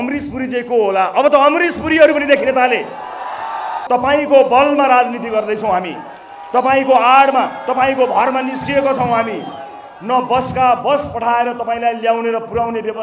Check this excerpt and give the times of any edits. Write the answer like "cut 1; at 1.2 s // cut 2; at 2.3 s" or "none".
cut 1; at 3.8 s